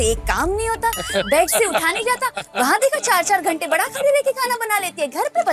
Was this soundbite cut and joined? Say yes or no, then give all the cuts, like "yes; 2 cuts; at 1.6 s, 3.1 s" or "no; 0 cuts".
no; 0 cuts